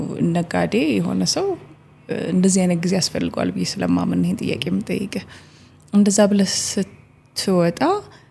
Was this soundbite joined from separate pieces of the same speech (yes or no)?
no